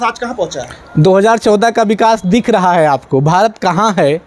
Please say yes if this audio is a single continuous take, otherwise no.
yes